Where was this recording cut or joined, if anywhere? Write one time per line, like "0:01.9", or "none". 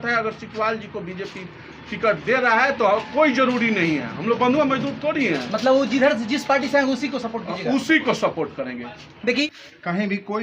0:09.5